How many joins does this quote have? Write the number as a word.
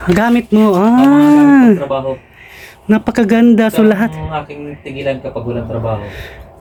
zero